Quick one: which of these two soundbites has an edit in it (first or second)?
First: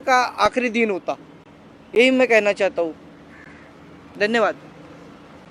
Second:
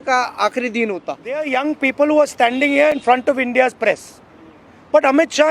second